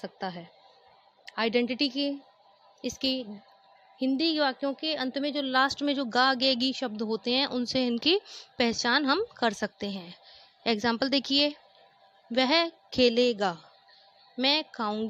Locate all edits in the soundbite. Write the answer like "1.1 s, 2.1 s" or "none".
none